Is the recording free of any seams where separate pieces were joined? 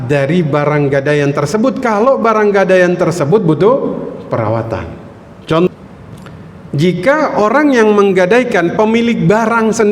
no; 1 cut; at 5.7 s

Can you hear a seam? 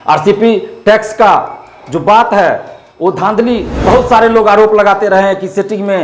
yes; 1 cut; at 3.8 s

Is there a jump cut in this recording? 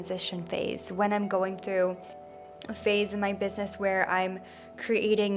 no; 0 cuts

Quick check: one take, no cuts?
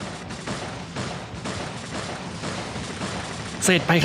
yes; 0 cuts

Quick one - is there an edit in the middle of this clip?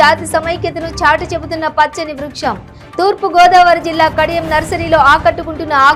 no; 0 cuts

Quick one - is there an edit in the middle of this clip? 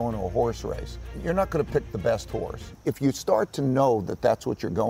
yes; 2 cuts; at 1.1 s, 2.7 s

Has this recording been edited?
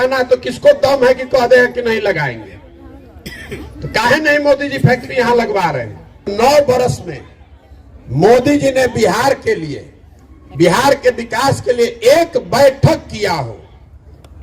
yes; 1 cut; at 6.3 s

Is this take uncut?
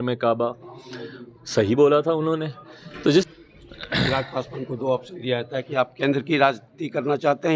no; 1 cut; at 3.3 s

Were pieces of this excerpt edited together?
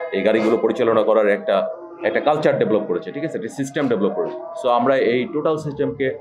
no; 0 cuts

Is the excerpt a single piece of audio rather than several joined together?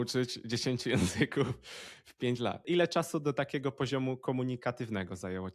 no; 1 cut; at 2.6 s

